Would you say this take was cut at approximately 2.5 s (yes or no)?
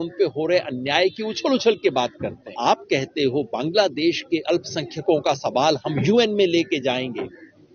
yes